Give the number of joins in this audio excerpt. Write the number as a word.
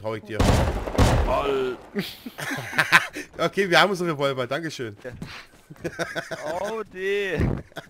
one